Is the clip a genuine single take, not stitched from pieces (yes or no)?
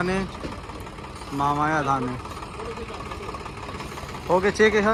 yes